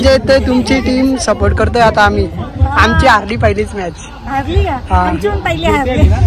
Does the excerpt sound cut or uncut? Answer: uncut